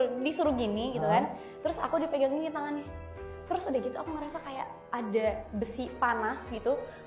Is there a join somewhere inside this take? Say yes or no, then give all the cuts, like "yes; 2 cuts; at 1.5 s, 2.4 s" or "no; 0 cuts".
yes; 1 cut; at 5.5 s